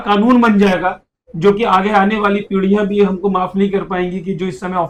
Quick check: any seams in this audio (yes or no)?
no